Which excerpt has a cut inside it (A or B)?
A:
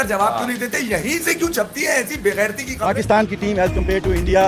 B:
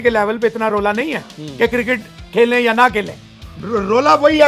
A